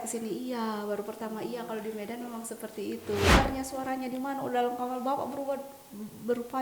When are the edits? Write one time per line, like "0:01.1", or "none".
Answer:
0:03.4